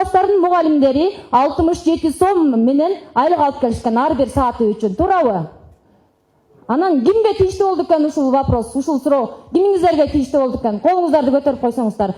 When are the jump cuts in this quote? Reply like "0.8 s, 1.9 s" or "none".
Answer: none